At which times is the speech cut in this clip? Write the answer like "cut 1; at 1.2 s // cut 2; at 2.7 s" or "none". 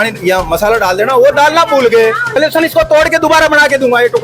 cut 1; at 2.3 s